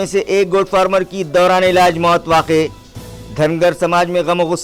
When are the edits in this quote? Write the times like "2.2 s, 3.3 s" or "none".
none